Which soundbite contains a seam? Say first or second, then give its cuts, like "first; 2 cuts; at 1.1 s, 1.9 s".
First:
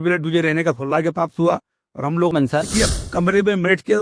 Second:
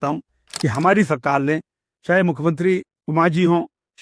first; 1 cut; at 2.3 s